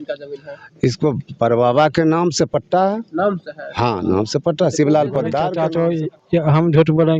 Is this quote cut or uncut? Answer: cut